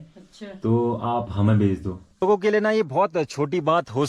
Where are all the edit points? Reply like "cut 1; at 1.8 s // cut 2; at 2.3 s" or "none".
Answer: cut 1; at 2.2 s